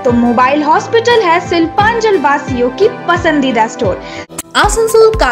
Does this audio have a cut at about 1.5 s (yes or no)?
no